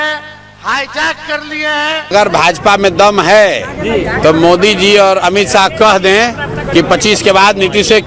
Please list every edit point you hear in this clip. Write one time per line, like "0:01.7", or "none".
0:02.0